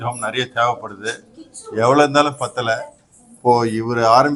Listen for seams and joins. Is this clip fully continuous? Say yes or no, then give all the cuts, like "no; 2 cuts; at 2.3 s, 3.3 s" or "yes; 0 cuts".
yes; 0 cuts